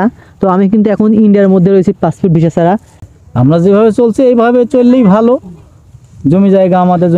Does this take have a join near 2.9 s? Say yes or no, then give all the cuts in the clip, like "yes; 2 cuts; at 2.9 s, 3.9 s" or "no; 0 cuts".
yes; 1 cut; at 2.9 s